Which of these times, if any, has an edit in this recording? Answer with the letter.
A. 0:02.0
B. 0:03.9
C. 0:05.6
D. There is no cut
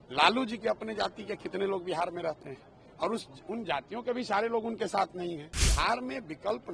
C